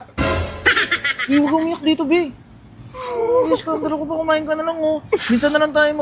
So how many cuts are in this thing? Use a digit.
0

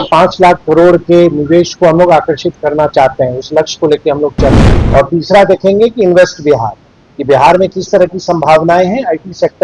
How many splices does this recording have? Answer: 1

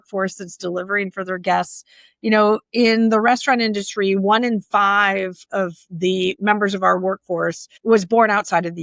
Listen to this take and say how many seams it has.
2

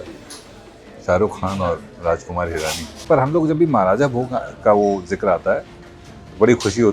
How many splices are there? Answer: 1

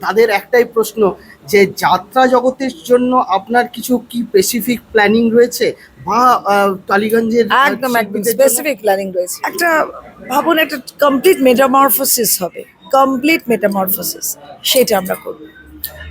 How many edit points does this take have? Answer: 1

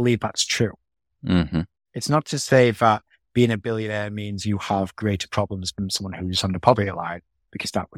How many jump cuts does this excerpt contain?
0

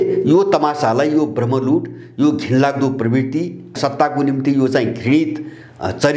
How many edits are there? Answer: 1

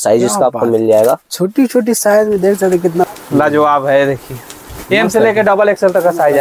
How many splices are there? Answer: 1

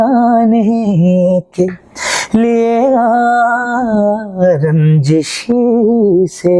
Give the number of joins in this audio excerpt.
0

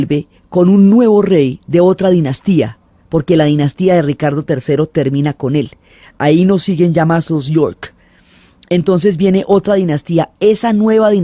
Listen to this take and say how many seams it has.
1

